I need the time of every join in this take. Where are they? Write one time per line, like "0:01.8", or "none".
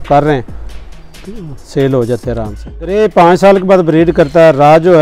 0:02.9